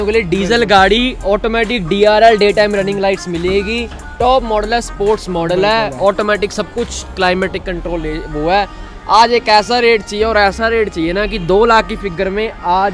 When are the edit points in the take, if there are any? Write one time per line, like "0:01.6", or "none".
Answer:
none